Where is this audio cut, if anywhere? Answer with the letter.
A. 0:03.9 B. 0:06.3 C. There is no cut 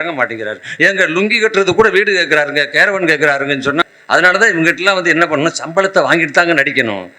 A